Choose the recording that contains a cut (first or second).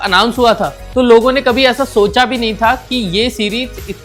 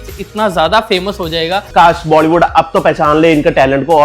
second